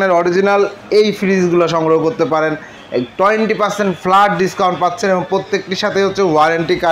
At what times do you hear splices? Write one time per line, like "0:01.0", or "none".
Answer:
none

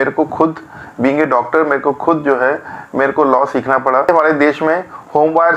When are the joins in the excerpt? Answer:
0:04.1

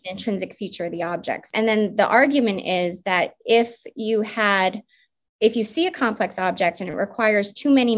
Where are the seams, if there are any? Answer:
0:01.5

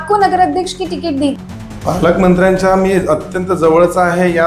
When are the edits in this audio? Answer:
0:01.4

